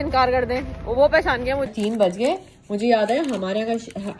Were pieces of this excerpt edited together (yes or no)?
yes